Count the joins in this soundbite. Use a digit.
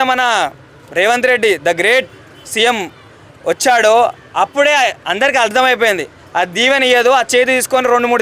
0